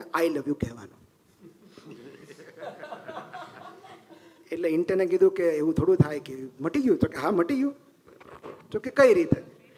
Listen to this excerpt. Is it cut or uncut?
uncut